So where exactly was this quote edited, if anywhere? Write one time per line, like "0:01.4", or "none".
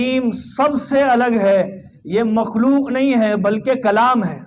none